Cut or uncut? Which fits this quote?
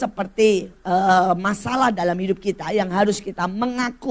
uncut